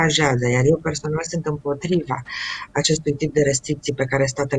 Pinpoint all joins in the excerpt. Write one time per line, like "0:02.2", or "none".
none